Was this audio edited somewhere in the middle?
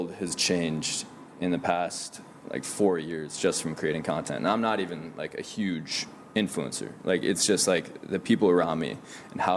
no; 0 cuts

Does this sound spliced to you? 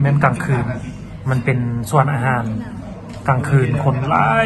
no; 0 cuts

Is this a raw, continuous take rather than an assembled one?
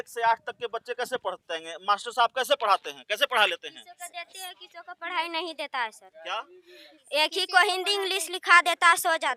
yes; 0 cuts

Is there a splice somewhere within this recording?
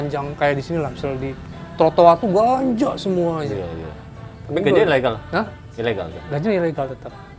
no; 0 cuts

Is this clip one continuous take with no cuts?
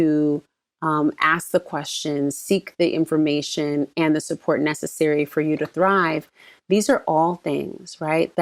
yes; 0 cuts

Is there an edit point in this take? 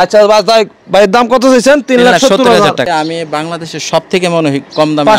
yes; 1 cut; at 2.9 s

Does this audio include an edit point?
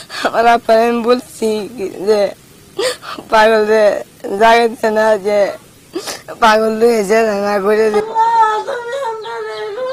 no; 0 cuts

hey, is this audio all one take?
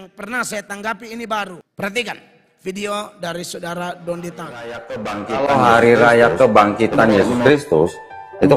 no; 1 cut; at 1.6 s

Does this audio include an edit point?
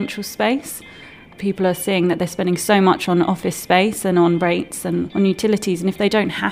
yes; 2 cuts; at 1.3 s, 5.1 s

